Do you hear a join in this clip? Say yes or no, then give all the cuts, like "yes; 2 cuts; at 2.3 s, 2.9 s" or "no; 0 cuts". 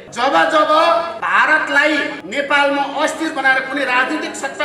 yes; 2 cuts; at 1.2 s, 2.2 s